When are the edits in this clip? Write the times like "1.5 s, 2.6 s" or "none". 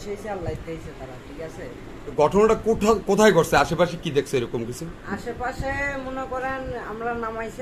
2.1 s